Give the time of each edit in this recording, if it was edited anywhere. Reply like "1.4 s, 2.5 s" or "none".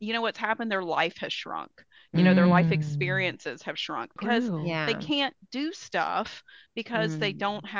4.1 s